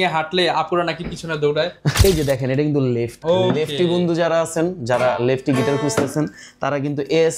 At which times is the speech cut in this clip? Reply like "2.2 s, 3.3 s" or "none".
1.9 s, 3.1 s